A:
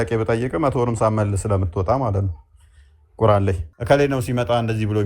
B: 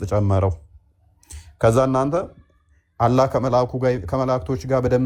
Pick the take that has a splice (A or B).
A